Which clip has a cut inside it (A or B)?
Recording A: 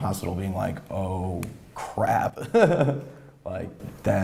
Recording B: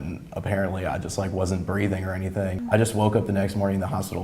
B